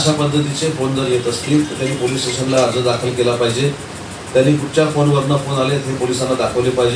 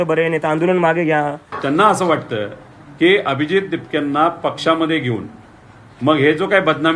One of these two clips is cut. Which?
second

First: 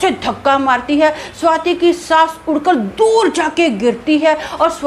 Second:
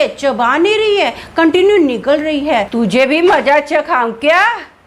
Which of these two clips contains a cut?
second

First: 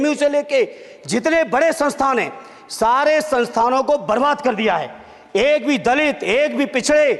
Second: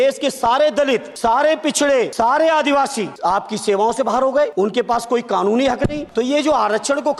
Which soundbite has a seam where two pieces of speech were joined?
second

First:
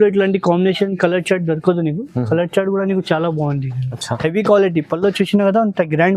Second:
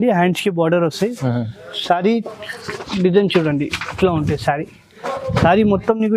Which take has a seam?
first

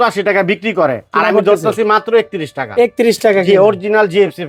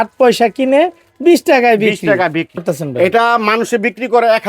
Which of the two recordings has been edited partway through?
second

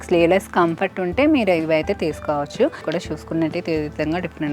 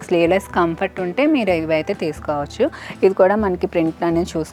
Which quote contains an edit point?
first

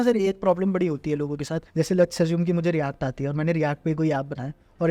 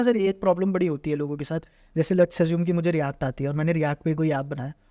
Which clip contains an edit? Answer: first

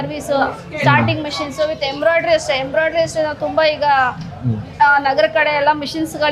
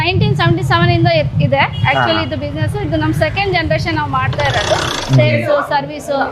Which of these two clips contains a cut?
second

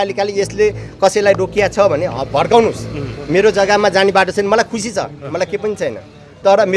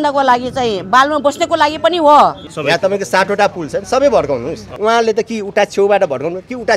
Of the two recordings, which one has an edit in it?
second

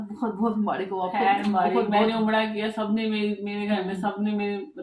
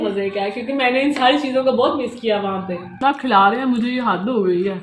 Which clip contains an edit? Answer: second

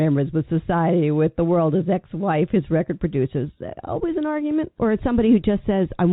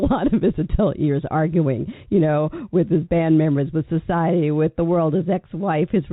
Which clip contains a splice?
first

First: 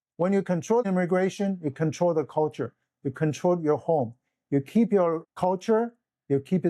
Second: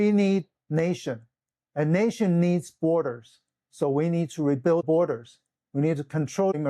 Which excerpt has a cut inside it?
first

